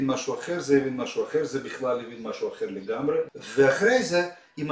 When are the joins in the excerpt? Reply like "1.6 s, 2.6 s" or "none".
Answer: 3.3 s